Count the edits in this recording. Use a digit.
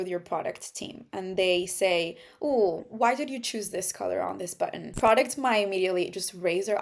1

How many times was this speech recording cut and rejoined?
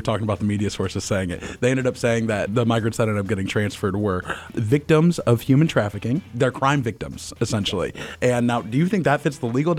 3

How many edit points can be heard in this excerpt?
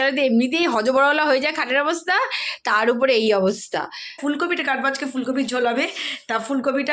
1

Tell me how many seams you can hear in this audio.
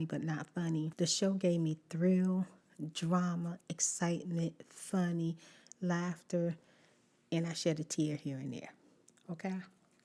1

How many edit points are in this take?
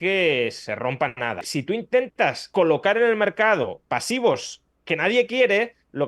3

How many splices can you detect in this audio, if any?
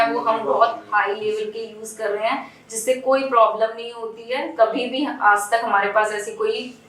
0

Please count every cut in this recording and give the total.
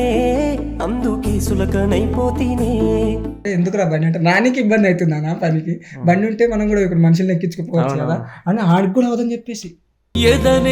1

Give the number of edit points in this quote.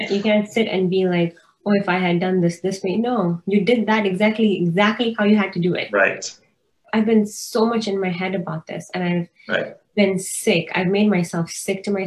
1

